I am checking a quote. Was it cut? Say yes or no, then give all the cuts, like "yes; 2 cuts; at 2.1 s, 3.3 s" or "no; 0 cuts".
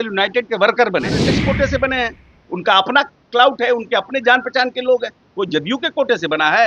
yes; 1 cut; at 1.2 s